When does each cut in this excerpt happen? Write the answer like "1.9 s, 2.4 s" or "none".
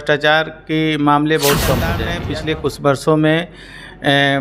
2.1 s